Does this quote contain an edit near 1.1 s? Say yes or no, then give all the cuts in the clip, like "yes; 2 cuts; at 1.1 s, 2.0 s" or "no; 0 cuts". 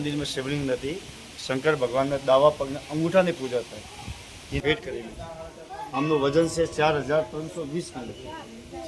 no; 1 cut; at 4.6 s